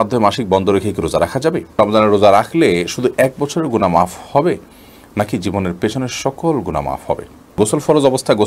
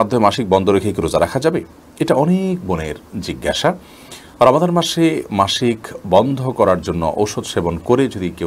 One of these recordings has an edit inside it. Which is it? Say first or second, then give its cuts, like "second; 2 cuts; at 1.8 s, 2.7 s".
first; 2 cuts; at 1.7 s, 7.6 s